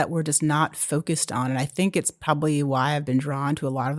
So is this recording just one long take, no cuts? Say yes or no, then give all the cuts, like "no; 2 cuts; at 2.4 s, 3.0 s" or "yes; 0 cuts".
yes; 0 cuts